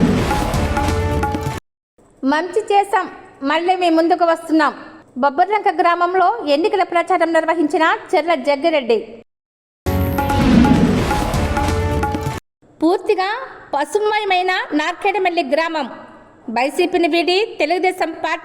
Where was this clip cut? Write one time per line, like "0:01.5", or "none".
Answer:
0:01.5